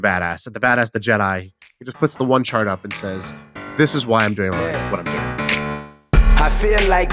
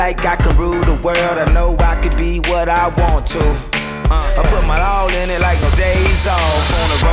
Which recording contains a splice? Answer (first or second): first